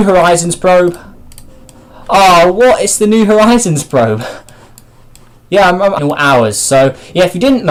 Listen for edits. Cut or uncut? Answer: uncut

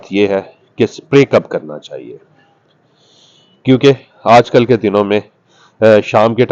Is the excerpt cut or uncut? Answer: uncut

